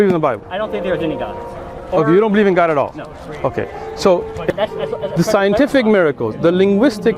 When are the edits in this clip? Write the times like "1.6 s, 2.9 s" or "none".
4.5 s